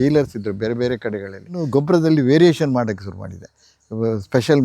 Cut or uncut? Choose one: cut